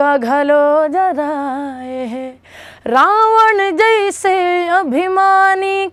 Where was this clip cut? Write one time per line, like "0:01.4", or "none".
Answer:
none